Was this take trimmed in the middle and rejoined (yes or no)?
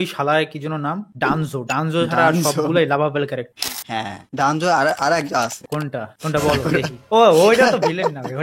no